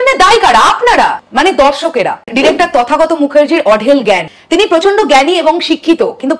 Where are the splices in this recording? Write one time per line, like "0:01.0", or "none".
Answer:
0:02.3